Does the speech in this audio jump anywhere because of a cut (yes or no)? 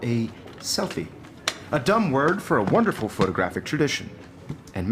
no